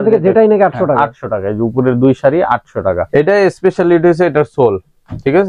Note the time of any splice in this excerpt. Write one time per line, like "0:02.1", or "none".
0:03.0

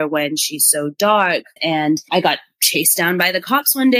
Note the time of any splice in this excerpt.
0:01.5

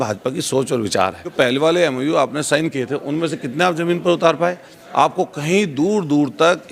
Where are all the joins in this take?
0:01.3

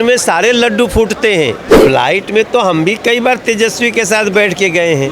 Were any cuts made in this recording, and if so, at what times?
0:01.9

